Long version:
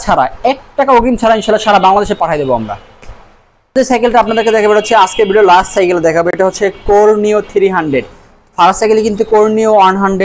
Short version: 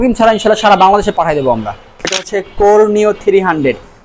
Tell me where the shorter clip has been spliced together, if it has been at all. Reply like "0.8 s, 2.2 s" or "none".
2.4 s

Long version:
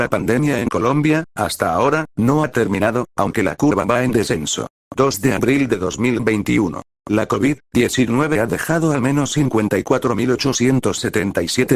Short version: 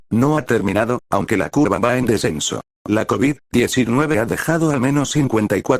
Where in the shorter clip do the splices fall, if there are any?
2.7 s

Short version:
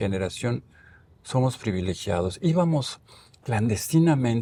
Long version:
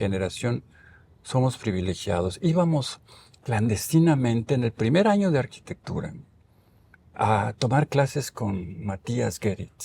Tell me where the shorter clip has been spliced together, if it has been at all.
none

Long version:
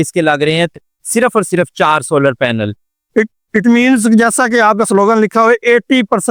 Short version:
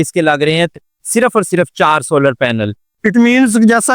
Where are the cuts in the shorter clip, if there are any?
2.9 s

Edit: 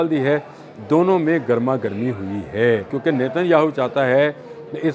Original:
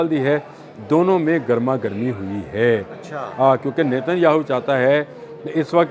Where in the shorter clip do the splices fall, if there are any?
2.9 s

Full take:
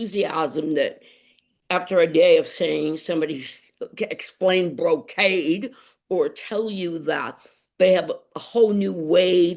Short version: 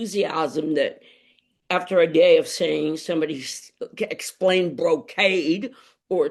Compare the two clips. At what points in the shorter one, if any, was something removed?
none

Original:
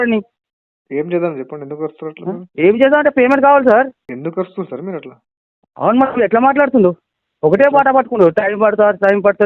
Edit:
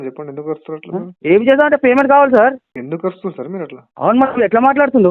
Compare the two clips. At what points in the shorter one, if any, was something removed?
3.8 s

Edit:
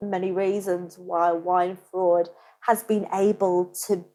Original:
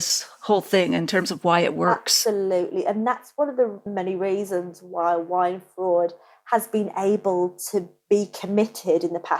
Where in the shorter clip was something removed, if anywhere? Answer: none

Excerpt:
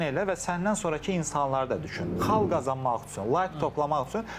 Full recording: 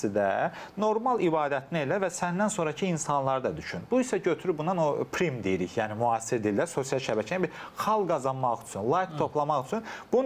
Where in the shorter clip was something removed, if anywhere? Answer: 2.0 s

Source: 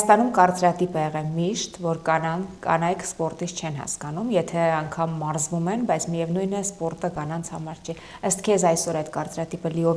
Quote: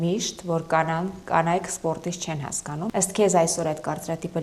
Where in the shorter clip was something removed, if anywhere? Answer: 2.9 s

